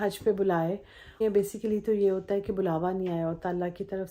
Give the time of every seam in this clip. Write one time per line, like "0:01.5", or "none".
0:01.1